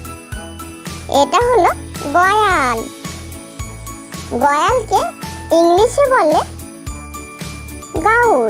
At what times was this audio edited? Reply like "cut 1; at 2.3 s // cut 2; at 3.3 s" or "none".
cut 1; at 1.0 s